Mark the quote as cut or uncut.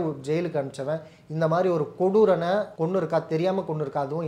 cut